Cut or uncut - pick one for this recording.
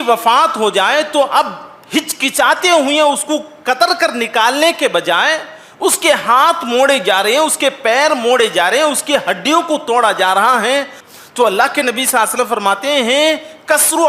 cut